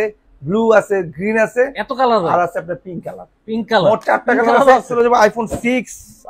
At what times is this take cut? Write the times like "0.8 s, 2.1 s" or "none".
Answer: 4.9 s